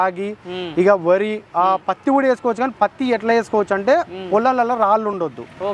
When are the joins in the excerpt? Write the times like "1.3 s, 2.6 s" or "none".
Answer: none